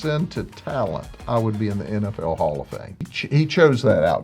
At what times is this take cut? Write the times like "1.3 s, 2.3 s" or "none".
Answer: 3.1 s